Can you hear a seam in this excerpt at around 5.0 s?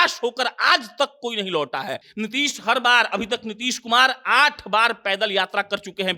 no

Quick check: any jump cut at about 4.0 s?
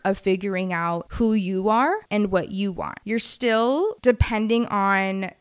yes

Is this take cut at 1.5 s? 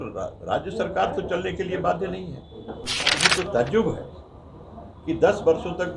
no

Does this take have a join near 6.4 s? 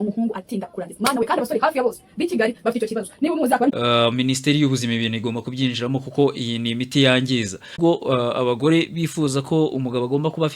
no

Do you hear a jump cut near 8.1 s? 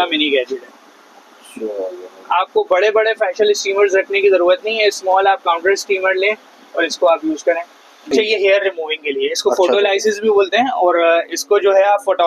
yes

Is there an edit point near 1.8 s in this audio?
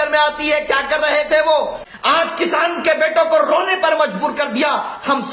yes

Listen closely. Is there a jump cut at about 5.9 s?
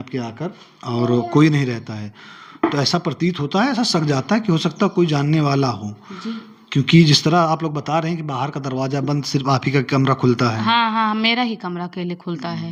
no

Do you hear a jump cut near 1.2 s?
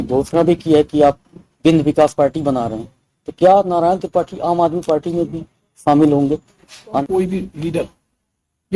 no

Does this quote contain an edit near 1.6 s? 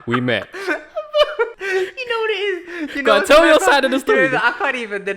yes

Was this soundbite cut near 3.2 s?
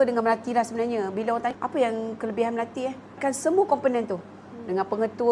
yes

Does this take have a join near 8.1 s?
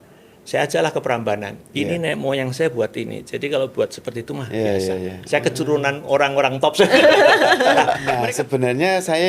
yes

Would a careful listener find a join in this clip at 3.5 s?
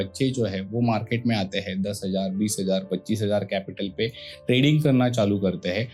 no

